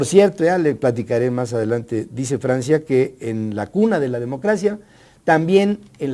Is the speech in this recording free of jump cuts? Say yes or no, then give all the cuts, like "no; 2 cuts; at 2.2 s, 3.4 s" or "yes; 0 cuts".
no; 1 cut; at 1.6 s